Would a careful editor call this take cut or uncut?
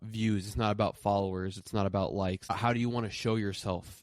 cut